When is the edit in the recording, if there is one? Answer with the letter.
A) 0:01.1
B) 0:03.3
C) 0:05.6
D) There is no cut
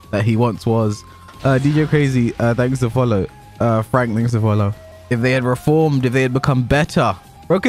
D